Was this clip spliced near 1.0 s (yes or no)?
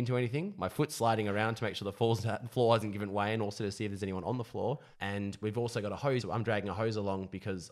no